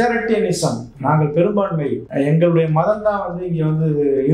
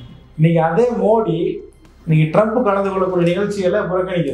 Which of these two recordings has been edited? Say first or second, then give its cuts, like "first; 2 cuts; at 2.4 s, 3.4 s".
first; 1 cut; at 2.0 s